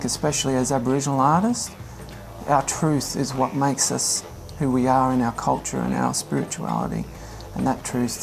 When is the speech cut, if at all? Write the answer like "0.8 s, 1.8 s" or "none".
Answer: none